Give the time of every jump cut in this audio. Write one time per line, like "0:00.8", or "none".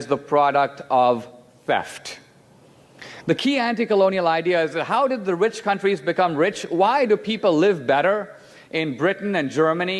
none